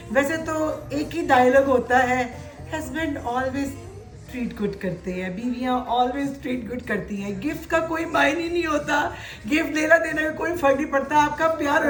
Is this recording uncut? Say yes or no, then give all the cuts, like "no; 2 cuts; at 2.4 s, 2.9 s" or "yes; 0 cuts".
yes; 0 cuts